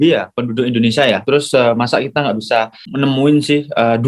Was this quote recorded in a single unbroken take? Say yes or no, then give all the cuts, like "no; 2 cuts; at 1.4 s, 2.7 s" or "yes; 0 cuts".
no; 2 cuts; at 1.2 s, 2.8 s